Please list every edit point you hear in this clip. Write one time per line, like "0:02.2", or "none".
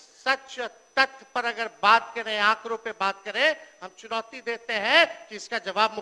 none

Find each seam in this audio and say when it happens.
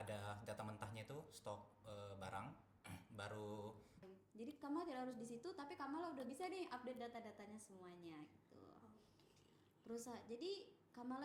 0:04.1

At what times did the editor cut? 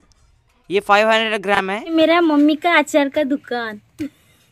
0:01.9

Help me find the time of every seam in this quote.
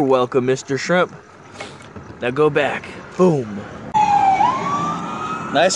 0:04.0

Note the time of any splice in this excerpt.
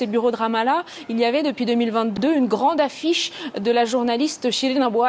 0:02.2

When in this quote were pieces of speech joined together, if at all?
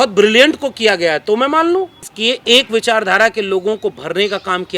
0:02.1

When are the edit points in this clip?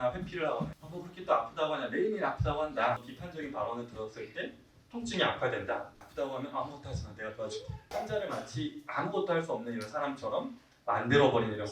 0:03.2
0:05.9

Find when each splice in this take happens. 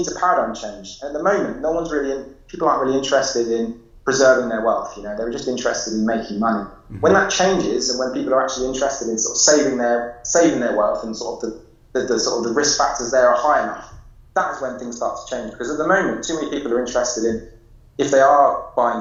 none

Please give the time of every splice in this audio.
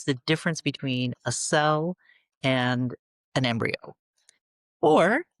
0:03.1

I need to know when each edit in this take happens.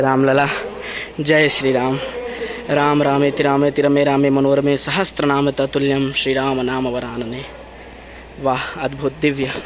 none

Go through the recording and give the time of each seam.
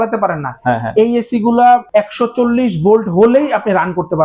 0:01.9

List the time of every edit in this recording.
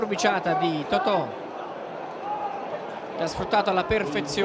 0:03.5

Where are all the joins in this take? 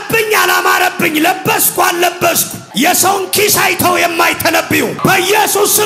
none

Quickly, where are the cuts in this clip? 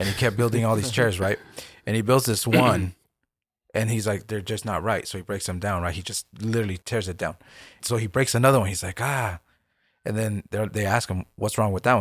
0:07.8

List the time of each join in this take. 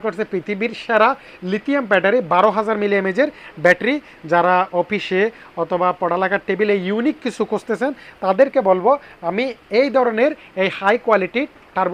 none

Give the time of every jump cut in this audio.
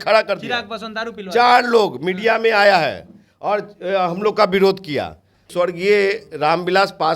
0:05.5

